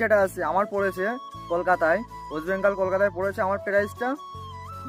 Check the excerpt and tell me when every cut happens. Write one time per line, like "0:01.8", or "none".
none